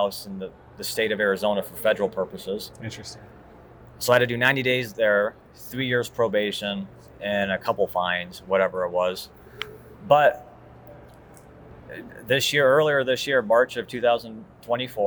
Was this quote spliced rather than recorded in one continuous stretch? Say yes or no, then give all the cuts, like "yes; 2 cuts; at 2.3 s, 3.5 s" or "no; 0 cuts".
no; 0 cuts